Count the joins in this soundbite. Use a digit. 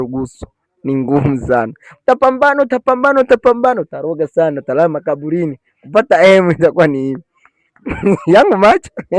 0